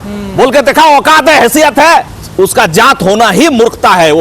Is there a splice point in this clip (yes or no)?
yes